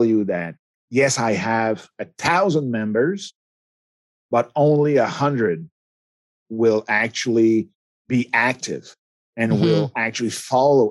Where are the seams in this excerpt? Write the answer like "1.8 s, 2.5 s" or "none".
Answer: 7.8 s